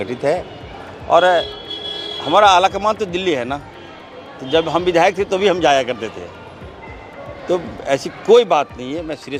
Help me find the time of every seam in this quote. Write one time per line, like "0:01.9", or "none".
none